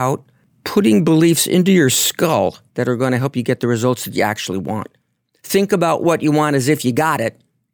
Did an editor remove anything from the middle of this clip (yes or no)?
yes